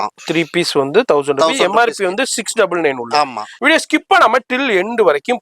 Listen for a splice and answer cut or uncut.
cut